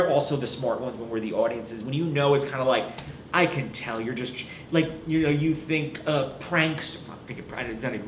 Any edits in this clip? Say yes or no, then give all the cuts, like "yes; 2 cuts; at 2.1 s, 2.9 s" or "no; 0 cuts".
no; 0 cuts